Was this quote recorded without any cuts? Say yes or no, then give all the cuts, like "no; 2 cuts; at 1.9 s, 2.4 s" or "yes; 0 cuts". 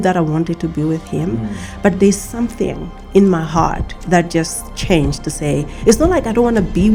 yes; 0 cuts